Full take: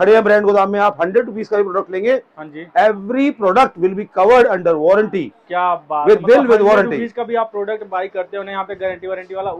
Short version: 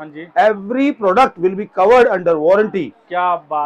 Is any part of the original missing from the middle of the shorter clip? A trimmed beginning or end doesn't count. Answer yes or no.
no